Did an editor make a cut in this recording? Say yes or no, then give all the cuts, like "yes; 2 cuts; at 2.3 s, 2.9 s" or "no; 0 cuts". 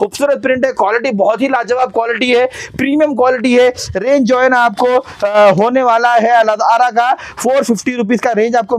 no; 0 cuts